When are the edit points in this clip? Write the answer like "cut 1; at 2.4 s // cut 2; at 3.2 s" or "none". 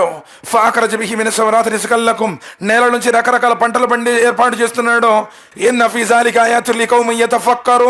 cut 1; at 5.5 s